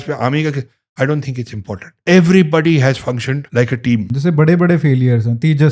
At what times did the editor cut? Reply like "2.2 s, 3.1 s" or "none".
1.9 s, 3.4 s, 4.1 s

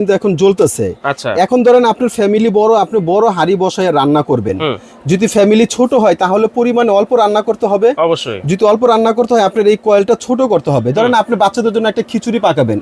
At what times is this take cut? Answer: none

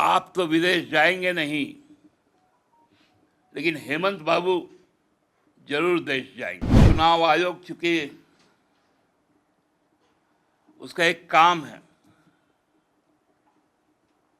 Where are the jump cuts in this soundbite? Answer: 6.8 s

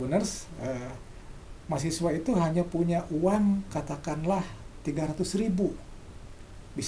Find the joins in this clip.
none

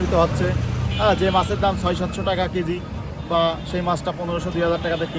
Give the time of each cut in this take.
none

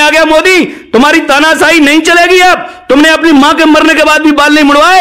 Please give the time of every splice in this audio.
none

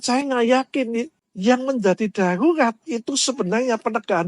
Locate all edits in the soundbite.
1.2 s

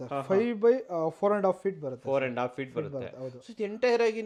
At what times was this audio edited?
none

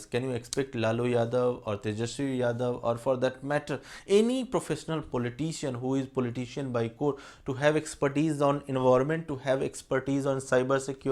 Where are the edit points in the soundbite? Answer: none

